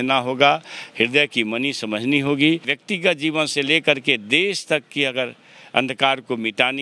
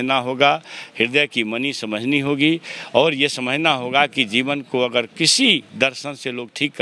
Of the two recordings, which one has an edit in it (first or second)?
first